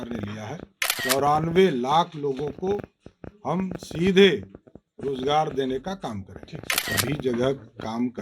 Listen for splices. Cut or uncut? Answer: cut